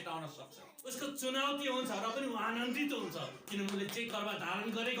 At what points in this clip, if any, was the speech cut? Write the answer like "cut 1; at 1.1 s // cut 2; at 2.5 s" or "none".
cut 1; at 0.9 s